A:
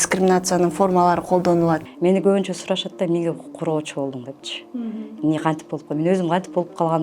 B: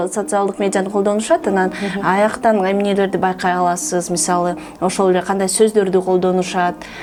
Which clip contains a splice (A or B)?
A